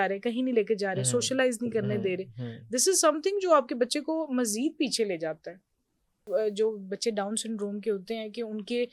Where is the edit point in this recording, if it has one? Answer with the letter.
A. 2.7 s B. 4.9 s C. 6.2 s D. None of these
C